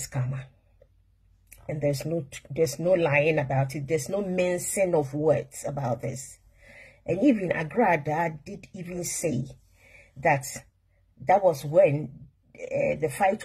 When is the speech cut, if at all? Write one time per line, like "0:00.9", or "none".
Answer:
none